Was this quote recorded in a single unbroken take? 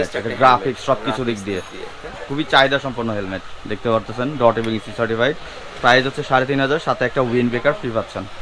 yes; 0 cuts

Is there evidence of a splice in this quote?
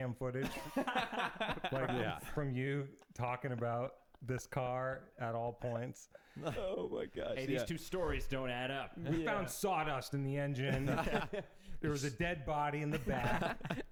no; 0 cuts

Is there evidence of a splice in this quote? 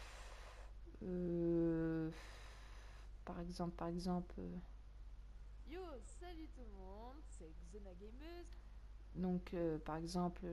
no; 0 cuts

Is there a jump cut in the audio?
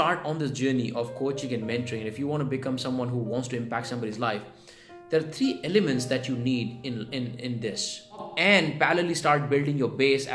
yes; 1 cut; at 8.3 s

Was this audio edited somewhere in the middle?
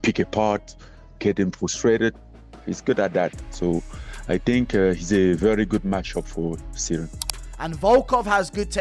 yes; 1 cut; at 7.3 s

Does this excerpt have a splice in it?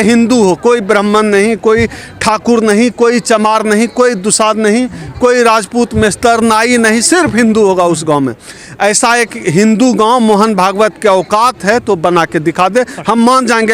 no; 0 cuts

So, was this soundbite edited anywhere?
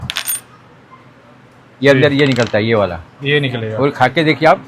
no; 0 cuts

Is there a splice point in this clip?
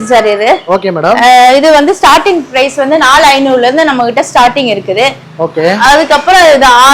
no; 0 cuts

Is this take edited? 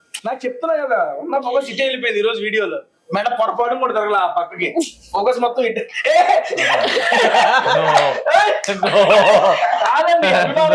no; 0 cuts

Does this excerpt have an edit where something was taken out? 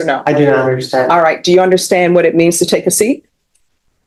no; 0 cuts

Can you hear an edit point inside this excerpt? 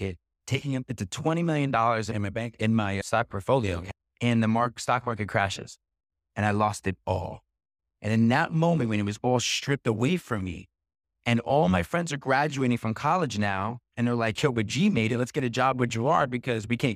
no; 0 cuts

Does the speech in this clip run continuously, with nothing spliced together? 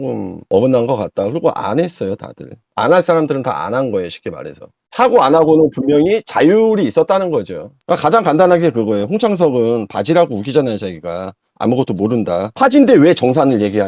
yes; 0 cuts

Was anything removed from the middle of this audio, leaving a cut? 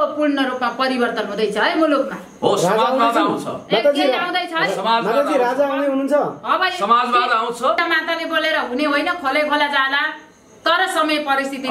yes; 1 cut; at 7.8 s

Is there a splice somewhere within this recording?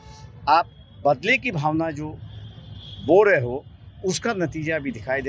no; 0 cuts

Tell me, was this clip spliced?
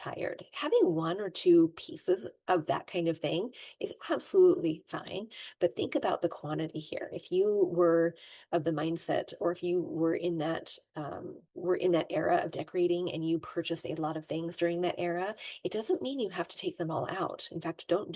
yes; 1 cut; at 2.3 s

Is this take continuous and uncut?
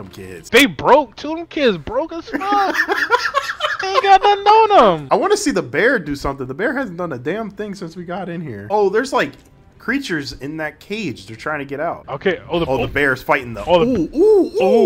yes; 0 cuts

